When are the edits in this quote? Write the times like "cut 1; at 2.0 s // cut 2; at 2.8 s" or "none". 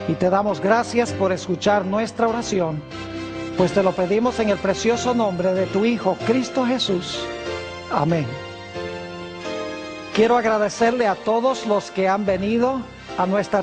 cut 1; at 11.5 s